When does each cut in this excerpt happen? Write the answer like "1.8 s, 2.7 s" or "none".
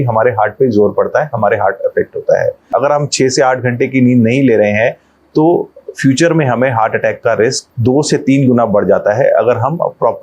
2.6 s, 7.7 s